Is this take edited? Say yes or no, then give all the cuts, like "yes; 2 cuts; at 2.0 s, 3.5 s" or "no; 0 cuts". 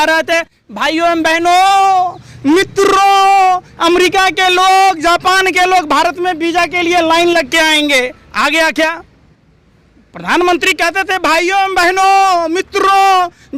no; 0 cuts